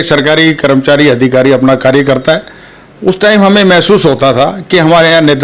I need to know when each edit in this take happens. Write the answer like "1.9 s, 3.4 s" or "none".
none